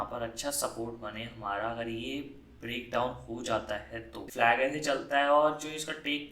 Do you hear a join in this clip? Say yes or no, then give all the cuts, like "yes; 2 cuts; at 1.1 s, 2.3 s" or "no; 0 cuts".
yes; 1 cut; at 4.2 s